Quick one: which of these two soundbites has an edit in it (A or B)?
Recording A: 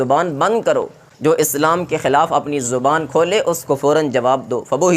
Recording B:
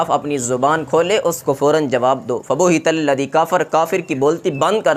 A